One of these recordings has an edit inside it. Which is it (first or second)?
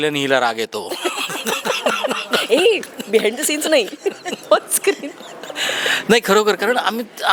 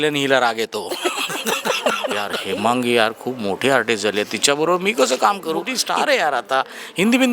second